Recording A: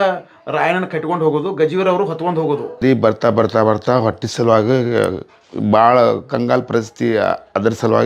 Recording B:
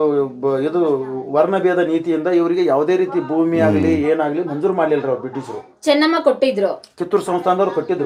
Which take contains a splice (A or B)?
A